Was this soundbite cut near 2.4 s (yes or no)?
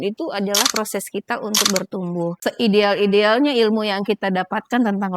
yes